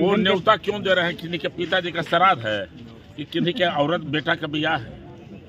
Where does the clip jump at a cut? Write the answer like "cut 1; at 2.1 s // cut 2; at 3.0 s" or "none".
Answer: none